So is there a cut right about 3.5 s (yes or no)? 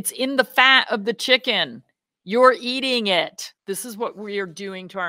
yes